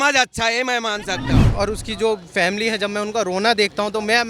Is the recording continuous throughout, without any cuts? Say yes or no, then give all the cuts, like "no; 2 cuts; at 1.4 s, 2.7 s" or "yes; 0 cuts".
no; 1 cut; at 1.5 s